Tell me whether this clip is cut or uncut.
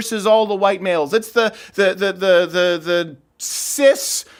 uncut